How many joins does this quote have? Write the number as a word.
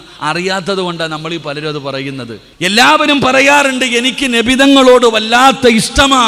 one